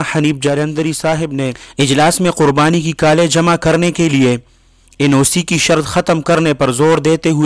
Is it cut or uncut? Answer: cut